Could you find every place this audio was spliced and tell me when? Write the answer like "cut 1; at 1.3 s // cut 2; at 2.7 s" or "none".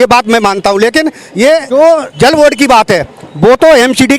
cut 1; at 2.0 s